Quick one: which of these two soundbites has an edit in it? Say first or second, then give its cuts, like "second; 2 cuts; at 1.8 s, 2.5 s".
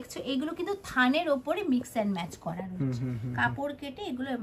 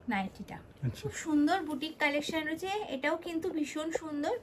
second; 1 cut; at 1.2 s